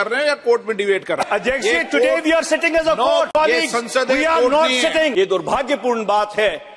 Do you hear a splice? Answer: yes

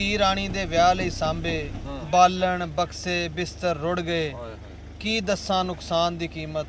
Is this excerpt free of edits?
yes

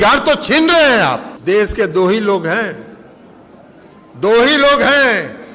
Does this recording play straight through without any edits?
no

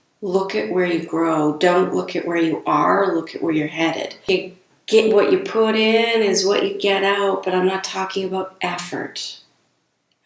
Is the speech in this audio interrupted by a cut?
yes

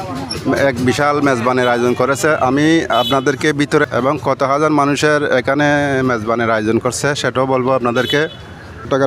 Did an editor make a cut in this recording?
yes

